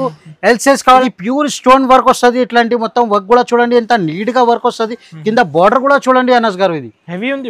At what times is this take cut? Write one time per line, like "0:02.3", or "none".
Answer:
0:01.0